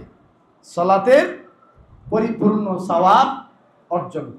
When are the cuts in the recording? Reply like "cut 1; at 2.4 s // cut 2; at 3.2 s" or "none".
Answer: none

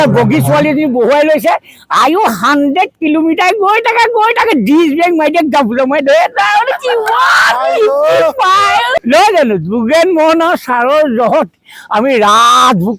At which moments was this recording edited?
cut 1; at 9.0 s

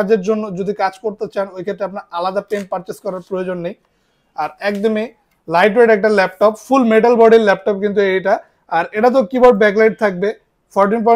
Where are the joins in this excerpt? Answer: none

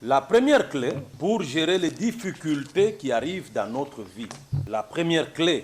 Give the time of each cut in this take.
cut 1; at 1.1 s // cut 2; at 4.5 s

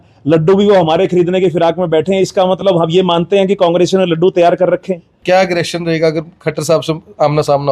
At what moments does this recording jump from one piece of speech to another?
cut 1; at 5.1 s

